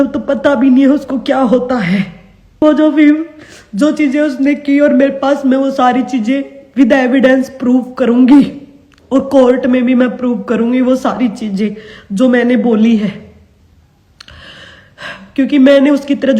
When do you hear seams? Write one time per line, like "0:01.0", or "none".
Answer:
0:02.6